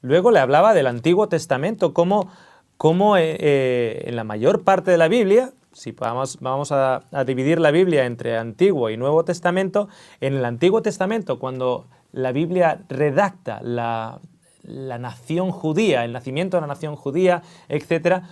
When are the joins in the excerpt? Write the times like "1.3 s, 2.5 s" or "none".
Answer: 16.2 s